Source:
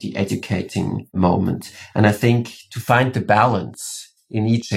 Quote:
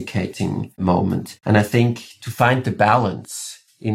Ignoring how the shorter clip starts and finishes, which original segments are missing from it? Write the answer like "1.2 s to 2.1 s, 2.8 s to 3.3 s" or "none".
1.7 s to 1.8 s